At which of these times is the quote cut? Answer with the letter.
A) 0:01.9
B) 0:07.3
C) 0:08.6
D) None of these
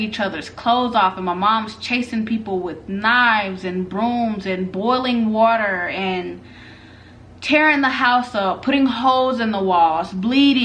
D